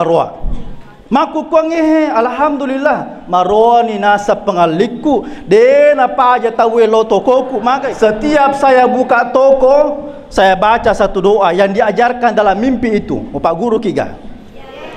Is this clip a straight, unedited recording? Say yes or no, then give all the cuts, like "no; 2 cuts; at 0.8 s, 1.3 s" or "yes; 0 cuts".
no; 1 cut; at 7.9 s